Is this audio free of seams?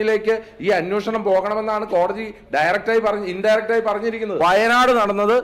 no; 1 cut; at 4.4 s

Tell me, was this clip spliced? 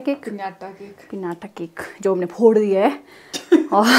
no; 0 cuts

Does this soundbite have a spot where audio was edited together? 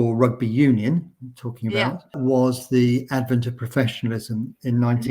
yes; 1 cut; at 2.2 s

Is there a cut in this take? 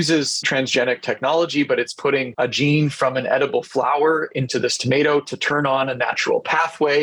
no; 0 cuts

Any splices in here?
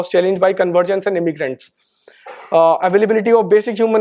no; 0 cuts

